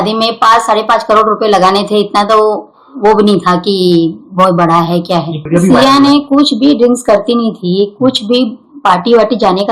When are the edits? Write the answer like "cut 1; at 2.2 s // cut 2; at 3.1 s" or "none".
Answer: cut 1; at 5.4 s